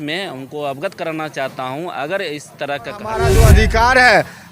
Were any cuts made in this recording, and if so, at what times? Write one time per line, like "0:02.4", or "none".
0:03.3